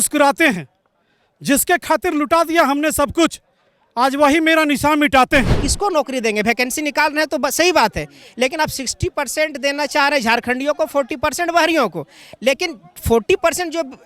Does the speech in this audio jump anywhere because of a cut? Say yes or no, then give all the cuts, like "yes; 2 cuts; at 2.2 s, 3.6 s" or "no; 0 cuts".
yes; 1 cut; at 5.6 s